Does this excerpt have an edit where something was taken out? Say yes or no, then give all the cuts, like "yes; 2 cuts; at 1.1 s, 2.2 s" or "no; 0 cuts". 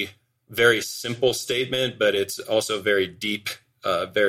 no; 0 cuts